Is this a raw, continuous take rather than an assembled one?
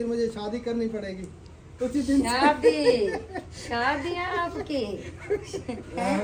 yes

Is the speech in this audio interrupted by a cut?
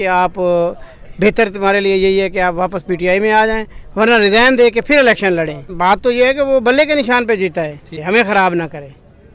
yes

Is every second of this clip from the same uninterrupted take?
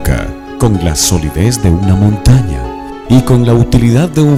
yes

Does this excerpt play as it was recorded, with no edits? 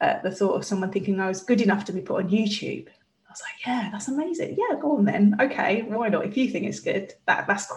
yes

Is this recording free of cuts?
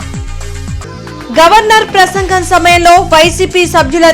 no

